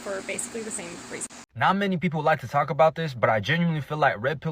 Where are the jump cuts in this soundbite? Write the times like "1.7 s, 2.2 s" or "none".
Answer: 1.4 s